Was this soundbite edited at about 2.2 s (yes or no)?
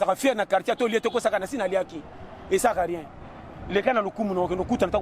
no